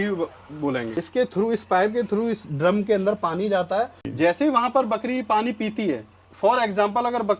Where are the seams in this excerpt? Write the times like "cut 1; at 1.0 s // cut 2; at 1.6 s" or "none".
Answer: cut 1; at 1.0 s // cut 2; at 4.0 s